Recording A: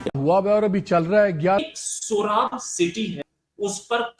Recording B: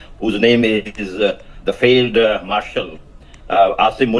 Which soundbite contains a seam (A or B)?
A